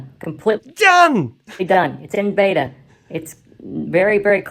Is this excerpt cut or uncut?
uncut